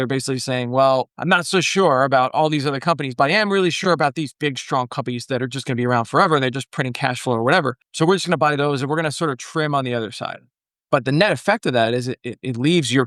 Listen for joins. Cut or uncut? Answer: cut